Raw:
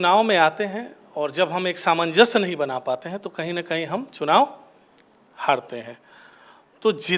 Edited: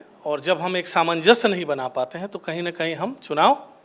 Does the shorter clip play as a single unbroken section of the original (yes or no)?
yes